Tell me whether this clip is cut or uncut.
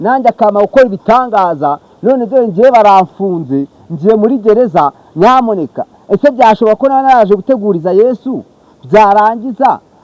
uncut